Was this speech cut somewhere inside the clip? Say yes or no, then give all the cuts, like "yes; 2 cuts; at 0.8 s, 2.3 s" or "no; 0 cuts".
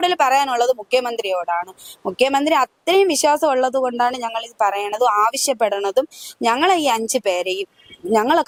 no; 0 cuts